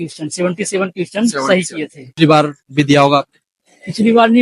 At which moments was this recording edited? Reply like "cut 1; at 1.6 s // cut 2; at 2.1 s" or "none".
cut 1; at 2.2 s